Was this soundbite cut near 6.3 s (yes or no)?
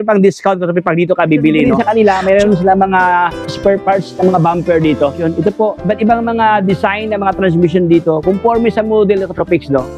no